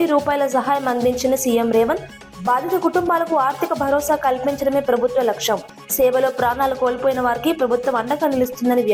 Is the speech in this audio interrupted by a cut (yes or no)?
no